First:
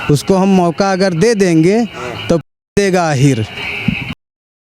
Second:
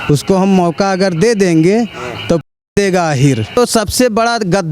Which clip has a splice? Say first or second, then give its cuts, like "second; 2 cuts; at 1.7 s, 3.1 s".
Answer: second; 1 cut; at 3.6 s